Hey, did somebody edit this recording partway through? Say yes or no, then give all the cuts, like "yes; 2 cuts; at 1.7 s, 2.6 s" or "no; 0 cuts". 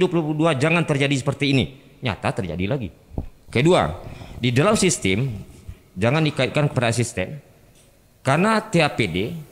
no; 0 cuts